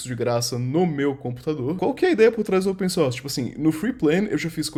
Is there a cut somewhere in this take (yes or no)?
no